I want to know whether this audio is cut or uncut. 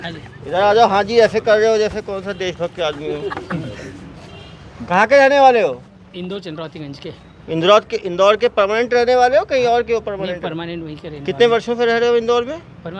uncut